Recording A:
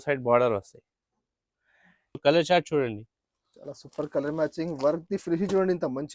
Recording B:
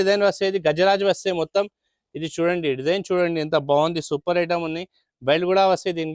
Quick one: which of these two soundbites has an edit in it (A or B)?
A